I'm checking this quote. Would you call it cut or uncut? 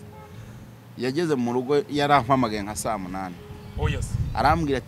uncut